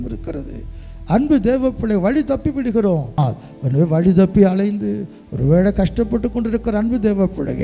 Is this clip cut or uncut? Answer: cut